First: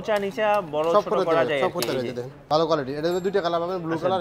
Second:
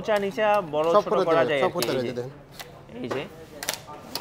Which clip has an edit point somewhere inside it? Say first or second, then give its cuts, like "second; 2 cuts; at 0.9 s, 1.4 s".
first; 1 cut; at 2.4 s